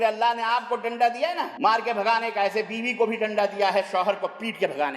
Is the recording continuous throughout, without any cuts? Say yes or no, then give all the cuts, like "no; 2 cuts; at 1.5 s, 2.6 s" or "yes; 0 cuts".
no; 1 cut; at 1.5 s